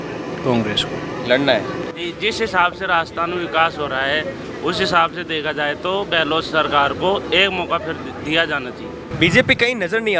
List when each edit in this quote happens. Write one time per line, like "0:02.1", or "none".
0:01.9
0:09.0